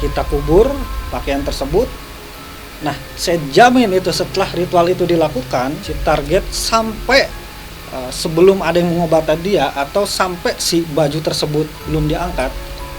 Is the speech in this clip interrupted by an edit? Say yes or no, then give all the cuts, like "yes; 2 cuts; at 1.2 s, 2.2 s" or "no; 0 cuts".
yes; 1 cut; at 5.9 s